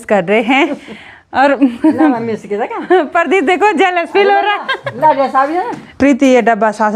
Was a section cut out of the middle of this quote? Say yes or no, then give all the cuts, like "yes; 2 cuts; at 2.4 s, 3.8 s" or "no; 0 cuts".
yes; 1 cut; at 6.0 s